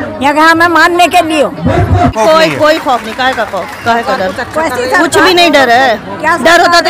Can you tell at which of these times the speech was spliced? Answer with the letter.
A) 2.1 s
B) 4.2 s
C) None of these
A